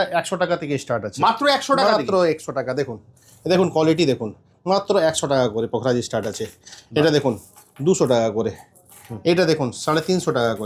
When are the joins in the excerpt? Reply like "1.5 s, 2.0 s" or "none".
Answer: none